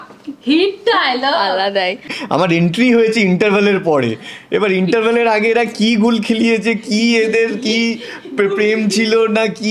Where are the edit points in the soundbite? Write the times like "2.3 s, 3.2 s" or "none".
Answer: 2.1 s